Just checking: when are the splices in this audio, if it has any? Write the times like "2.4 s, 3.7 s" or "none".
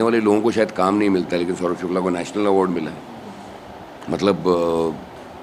none